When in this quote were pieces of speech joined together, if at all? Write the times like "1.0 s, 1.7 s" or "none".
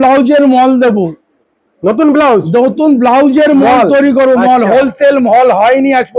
none